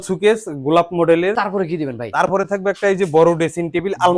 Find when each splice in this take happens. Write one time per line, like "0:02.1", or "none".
0:01.4